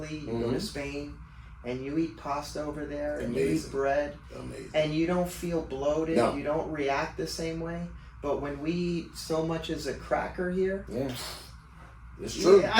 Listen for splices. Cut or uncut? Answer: uncut